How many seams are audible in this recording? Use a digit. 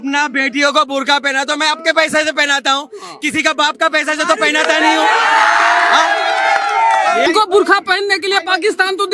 1